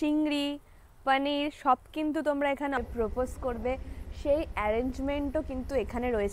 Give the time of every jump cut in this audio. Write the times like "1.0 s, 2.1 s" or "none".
2.8 s